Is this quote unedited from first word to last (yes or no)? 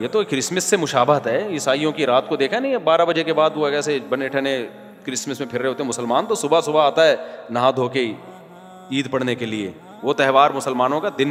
yes